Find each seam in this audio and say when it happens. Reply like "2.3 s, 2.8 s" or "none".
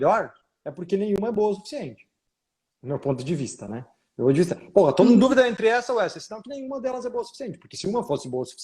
none